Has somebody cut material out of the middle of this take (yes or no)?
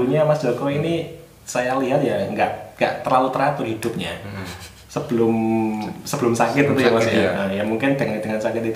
no